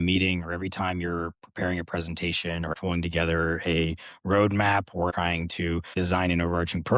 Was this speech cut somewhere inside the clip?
yes; 2 cuts; at 2.7 s, 5.2 s

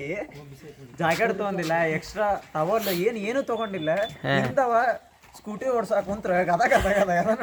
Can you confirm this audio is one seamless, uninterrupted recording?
yes; 0 cuts

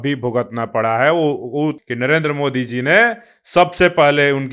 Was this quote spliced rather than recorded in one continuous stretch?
yes; 1 cut; at 1.8 s

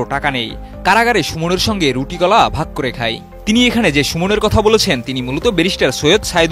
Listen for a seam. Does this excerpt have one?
no; 0 cuts

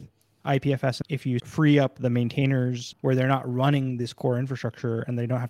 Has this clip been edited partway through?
yes; 2 cuts; at 1.2 s, 2.9 s

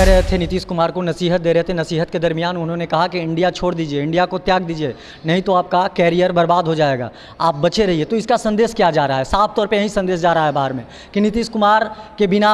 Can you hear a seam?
no; 0 cuts

